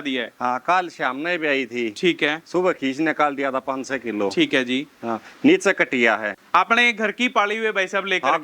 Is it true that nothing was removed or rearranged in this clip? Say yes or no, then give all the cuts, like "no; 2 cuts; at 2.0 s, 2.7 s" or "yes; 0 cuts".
no; 1 cut; at 6.4 s